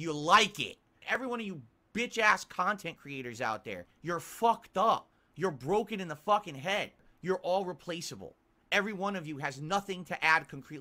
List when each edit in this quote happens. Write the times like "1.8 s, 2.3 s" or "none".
1.2 s, 3.9 s, 7.0 s